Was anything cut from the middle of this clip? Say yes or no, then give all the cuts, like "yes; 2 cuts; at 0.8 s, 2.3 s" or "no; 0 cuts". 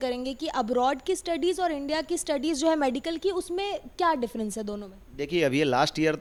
no; 0 cuts